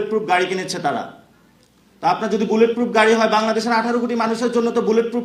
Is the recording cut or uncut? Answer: uncut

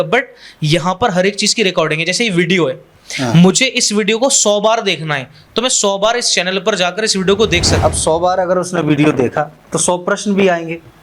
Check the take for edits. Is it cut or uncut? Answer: cut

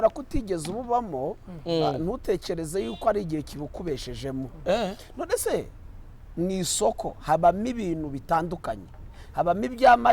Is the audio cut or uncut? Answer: uncut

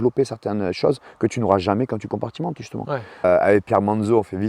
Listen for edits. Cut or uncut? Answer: cut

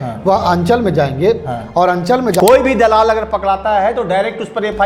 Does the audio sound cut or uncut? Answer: cut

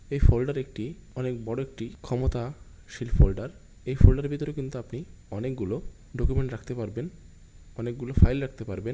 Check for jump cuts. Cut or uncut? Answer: cut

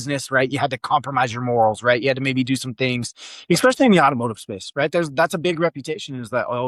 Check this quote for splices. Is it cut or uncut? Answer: uncut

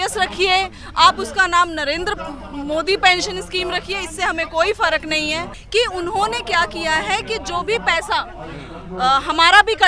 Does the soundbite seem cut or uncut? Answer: cut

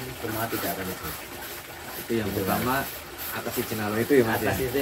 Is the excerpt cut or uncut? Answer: uncut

